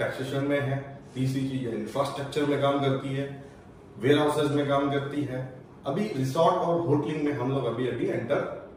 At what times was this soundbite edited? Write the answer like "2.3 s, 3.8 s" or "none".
none